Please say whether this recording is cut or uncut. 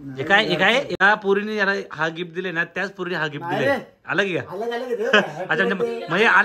cut